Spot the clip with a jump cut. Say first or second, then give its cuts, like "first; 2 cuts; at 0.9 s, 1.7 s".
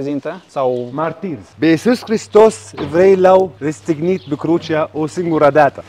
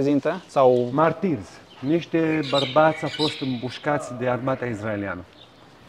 first; 2 cuts; at 1.4 s, 3.6 s